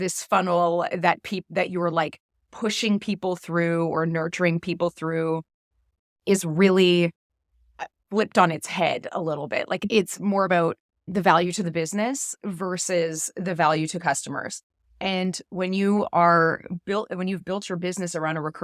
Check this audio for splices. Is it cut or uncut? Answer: uncut